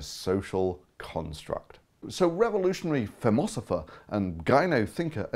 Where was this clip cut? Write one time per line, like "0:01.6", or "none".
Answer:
0:01.0